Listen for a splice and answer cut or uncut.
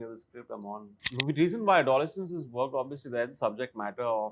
cut